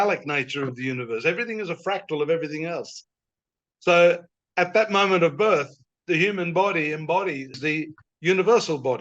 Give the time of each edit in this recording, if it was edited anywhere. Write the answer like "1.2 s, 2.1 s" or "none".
7.6 s